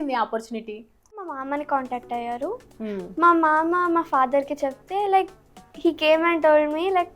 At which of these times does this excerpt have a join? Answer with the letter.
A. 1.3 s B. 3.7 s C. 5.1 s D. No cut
A